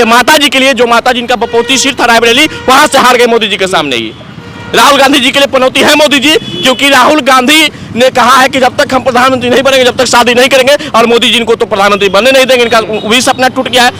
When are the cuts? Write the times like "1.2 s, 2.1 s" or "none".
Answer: none